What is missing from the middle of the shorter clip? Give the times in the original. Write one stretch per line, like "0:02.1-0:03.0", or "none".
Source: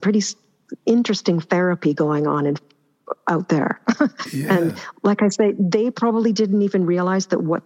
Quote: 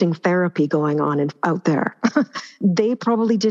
0:02.6-0:03.2
0:04.4-0:05.5